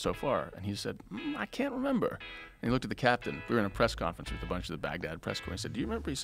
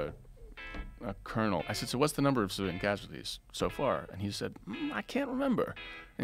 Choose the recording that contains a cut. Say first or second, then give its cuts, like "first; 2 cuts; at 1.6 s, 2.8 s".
second; 1 cut; at 1.6 s